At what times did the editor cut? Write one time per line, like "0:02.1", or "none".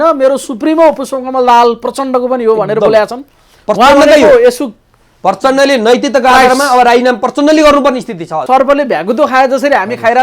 0:08.4